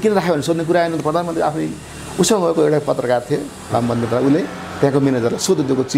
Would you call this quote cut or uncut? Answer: uncut